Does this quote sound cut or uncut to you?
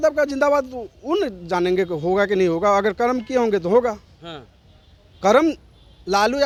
uncut